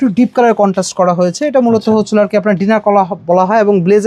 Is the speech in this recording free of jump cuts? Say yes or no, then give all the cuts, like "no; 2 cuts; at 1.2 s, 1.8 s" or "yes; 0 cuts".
yes; 0 cuts